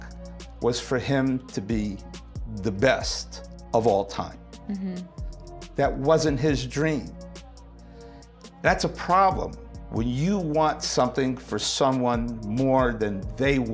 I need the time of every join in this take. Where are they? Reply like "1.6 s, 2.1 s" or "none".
none